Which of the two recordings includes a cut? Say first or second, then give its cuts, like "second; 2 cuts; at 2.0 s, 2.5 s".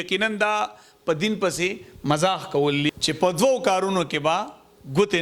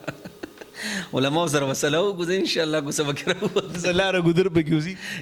first; 1 cut; at 2.9 s